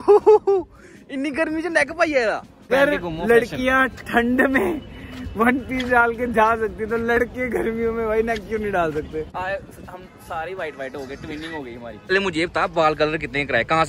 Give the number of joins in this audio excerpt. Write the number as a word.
three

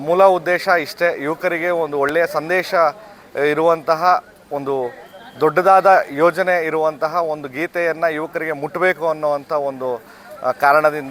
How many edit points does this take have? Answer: zero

